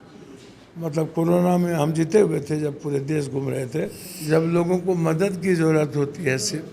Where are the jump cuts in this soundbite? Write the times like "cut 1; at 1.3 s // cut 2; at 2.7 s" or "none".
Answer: cut 1; at 4.1 s